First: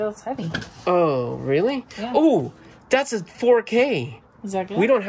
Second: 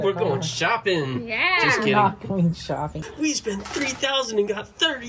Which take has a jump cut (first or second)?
second